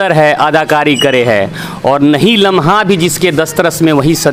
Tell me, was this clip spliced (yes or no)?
no